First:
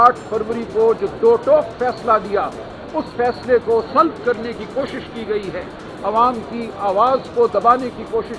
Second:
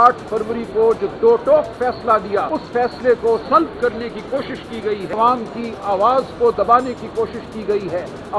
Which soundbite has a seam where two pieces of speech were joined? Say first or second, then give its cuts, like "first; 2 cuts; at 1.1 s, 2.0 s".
second; 2 cuts; at 2.6 s, 5.1 s